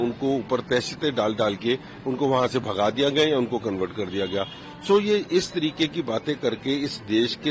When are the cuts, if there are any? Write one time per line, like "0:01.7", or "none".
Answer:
none